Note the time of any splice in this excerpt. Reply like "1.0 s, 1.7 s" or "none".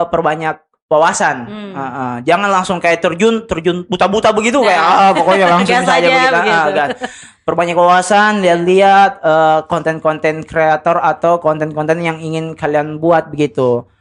none

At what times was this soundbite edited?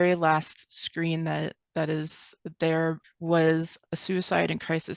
3.0 s

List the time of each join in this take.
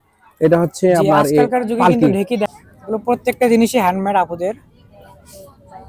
2.5 s

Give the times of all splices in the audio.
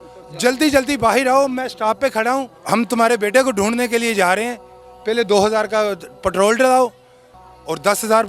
2.5 s

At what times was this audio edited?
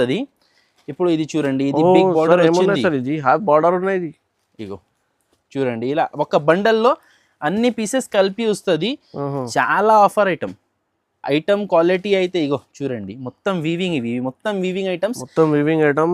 none

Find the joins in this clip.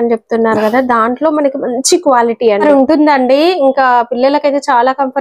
2.6 s

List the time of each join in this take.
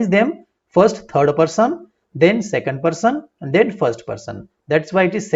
none

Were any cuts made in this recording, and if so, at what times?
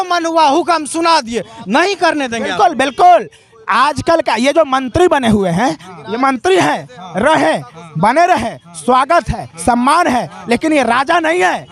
none

